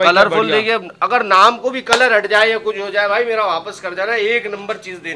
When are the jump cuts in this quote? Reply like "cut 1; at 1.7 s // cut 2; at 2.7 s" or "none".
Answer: none